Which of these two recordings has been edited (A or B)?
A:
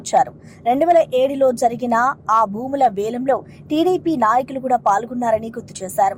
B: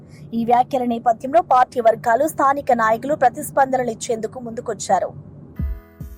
B